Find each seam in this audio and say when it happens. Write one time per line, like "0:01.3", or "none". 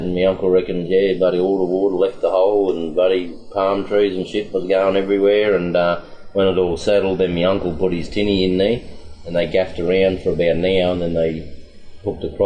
none